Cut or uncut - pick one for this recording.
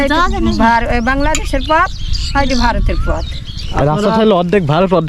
uncut